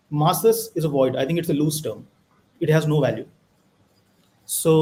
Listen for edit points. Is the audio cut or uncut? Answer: uncut